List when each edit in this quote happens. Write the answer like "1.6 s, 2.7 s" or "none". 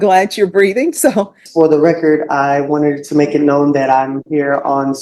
1.4 s

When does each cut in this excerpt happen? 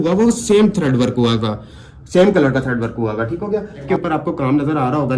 3.8 s

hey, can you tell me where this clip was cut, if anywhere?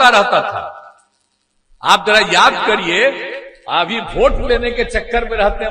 none

